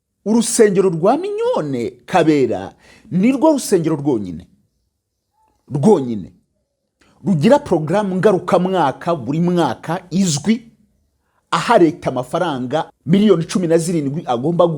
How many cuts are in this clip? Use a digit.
1